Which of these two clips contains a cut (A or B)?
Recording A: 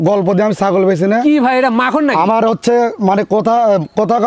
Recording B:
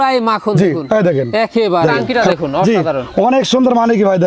B